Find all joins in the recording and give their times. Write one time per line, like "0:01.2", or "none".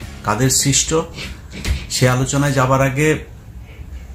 none